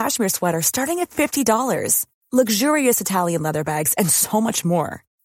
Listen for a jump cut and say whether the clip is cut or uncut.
uncut